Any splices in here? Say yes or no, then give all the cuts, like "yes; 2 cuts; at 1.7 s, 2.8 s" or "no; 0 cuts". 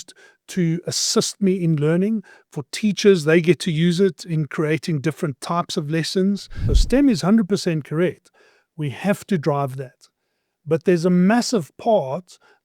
yes; 1 cut; at 6.6 s